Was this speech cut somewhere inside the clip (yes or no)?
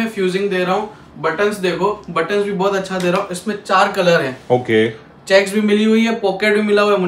no